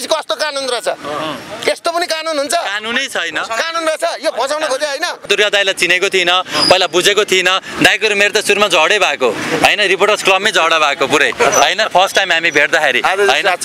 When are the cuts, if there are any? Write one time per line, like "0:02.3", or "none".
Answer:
0:05.2